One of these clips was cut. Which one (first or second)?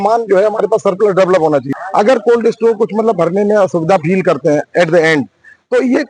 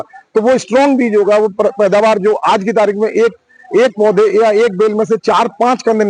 first